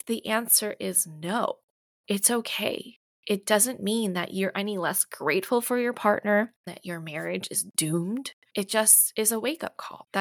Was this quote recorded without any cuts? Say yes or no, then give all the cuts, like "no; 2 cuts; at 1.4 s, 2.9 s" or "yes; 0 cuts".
no; 2 cuts; at 6.8 s, 8.4 s